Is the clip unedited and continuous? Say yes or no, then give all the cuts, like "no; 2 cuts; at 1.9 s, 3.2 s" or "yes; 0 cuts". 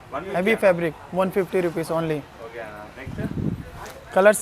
yes; 0 cuts